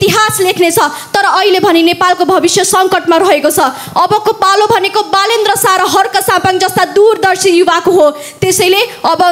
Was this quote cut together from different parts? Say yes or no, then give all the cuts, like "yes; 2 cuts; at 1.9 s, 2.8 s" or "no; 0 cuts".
no; 0 cuts